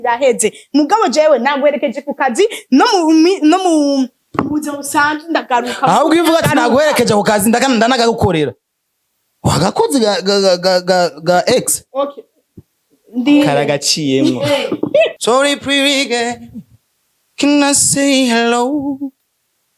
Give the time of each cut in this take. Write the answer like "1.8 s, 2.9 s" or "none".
15.1 s